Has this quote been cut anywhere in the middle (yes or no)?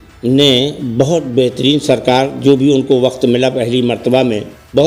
no